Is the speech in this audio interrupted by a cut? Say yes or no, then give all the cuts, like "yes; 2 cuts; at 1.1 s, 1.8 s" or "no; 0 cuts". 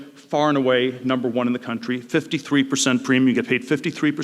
no; 0 cuts